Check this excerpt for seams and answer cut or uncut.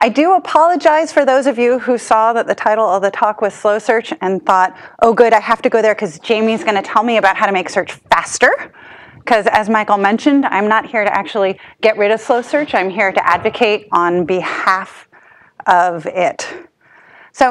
uncut